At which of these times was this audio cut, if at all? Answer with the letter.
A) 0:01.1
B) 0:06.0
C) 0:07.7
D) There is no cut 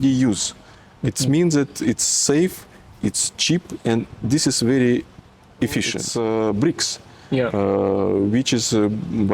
B